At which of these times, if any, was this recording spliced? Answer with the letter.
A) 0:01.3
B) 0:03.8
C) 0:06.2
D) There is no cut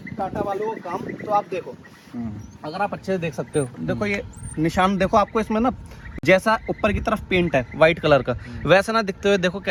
D